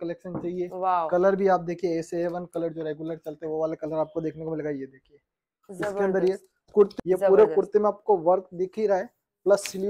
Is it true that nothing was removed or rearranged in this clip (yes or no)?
no